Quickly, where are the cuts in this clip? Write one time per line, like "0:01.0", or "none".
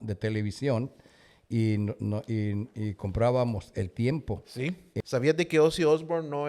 0:04.9